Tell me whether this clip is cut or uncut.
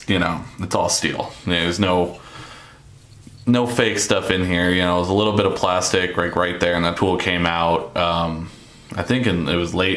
uncut